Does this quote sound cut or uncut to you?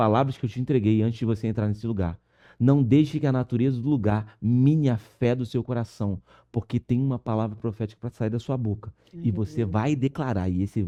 uncut